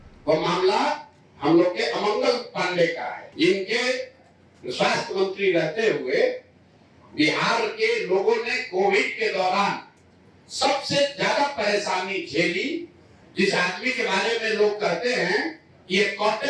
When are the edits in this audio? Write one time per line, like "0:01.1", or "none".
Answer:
0:03.3

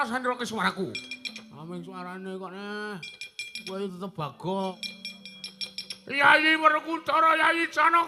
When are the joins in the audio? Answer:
0:04.8

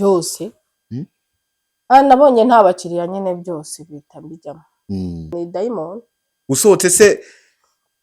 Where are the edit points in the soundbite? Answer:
0:05.3

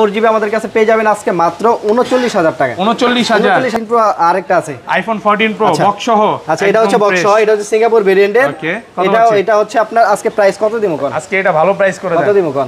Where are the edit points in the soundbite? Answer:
0:03.7

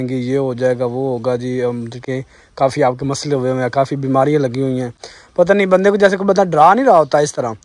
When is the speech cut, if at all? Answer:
none

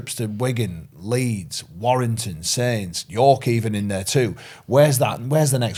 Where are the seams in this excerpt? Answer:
none

